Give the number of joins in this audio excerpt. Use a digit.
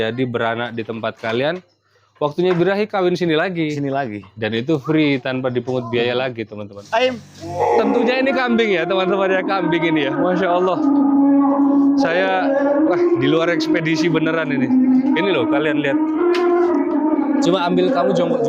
1